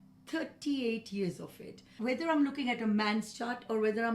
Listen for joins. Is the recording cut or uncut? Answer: cut